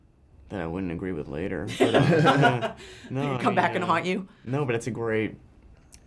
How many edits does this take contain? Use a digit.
0